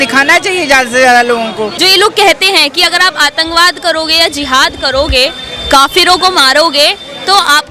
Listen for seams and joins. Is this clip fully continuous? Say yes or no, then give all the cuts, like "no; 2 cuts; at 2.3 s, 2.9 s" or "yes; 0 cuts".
no; 1 cut; at 1.7 s